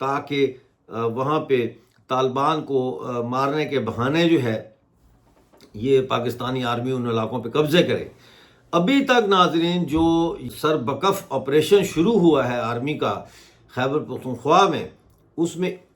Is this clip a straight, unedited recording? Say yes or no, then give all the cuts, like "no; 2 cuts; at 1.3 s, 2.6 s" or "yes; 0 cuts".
no; 1 cut; at 10.4 s